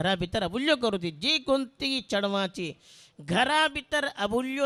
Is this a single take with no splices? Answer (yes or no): yes